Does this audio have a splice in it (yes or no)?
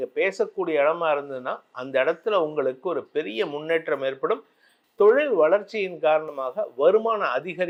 no